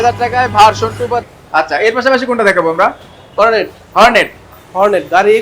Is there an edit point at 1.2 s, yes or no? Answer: yes